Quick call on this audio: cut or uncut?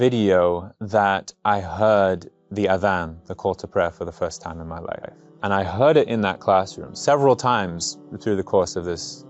cut